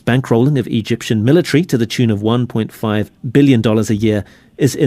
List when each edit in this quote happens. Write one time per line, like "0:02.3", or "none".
0:03.2